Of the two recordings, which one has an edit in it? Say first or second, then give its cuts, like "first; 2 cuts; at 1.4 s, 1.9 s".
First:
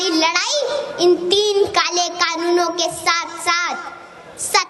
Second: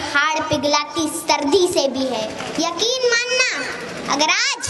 second; 1 cut; at 2.4 s